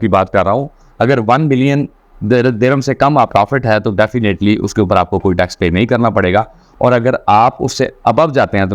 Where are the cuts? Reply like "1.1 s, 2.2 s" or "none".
3.3 s